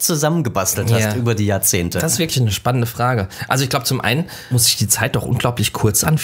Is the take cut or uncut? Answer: cut